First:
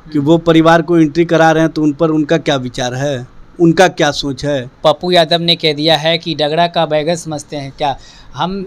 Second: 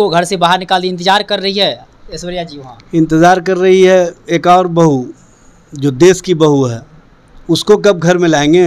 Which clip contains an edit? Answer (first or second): first